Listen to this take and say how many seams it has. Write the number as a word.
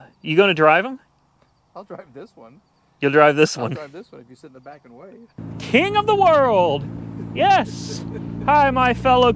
one